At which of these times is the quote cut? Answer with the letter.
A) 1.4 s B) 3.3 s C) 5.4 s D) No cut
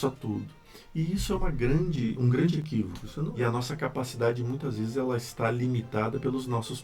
B